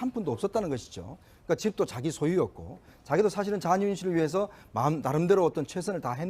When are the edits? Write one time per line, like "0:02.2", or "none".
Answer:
0:03.2